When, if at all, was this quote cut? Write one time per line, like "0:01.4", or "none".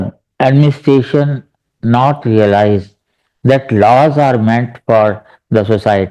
none